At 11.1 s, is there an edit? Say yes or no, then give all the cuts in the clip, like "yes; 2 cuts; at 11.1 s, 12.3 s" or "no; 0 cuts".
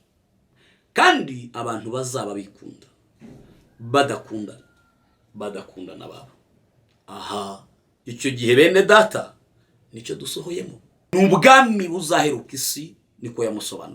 yes; 1 cut; at 11.1 s